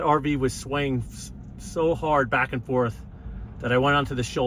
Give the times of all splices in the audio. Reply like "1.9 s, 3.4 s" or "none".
none